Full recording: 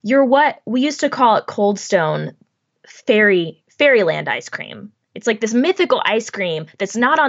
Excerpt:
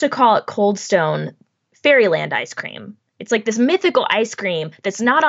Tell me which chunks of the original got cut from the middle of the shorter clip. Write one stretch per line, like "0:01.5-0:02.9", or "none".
0:02.7-0:03.6